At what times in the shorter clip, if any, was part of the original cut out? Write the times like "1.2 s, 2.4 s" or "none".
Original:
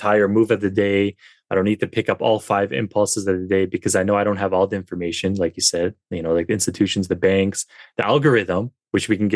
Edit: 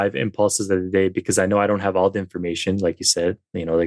none